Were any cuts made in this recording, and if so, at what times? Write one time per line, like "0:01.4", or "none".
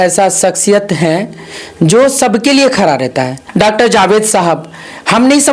0:03.4